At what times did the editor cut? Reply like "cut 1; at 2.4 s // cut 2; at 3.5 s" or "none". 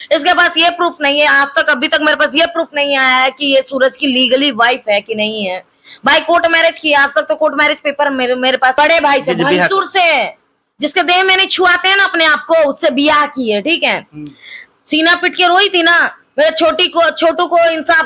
cut 1; at 8.8 s